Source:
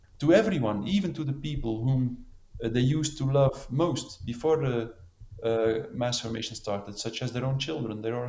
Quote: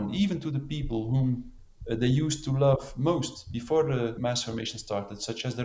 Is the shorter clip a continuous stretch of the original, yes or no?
no